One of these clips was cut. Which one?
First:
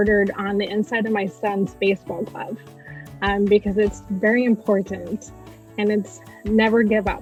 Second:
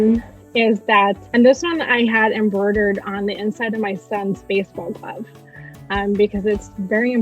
second; 1 cut; at 1.2 s

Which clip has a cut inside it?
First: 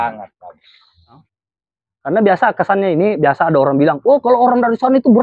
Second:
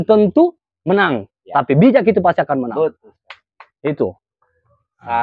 first; 1 cut; at 1.3 s

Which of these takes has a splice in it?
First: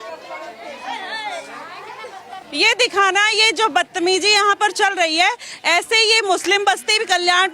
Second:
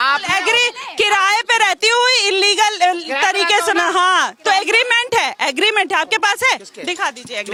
first; 1 cut; at 2.4 s

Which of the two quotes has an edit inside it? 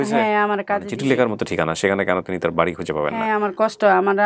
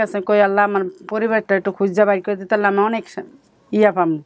first; 2 cuts; at 0.9 s, 3.3 s

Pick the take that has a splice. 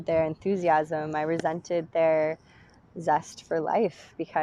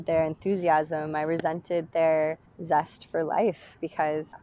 second; 1 cut; at 2.5 s

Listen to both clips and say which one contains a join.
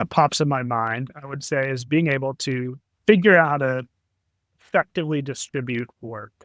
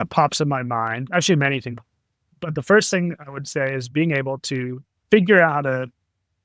first; 1 cut; at 1.1 s

